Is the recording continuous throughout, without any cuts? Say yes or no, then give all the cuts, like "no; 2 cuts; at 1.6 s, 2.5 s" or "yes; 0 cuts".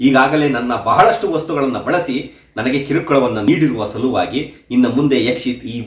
no; 1 cut; at 3.4 s